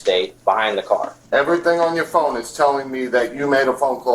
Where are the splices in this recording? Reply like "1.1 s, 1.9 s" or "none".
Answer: 1.1 s